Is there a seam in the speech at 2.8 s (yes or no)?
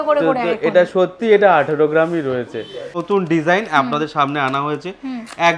yes